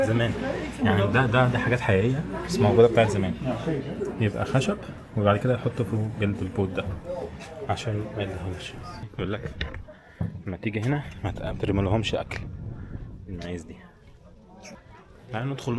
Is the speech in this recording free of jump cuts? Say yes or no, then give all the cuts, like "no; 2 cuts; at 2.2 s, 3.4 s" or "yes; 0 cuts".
no; 2 cuts; at 9.1 s, 14.8 s